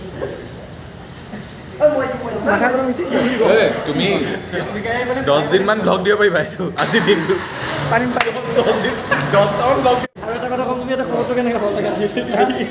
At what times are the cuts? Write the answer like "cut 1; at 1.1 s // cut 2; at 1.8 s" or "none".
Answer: cut 1; at 10.0 s